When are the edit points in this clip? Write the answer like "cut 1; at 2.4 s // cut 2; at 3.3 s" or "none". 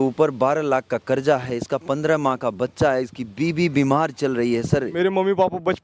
cut 1; at 4.9 s